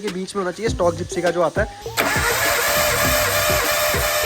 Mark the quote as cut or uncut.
cut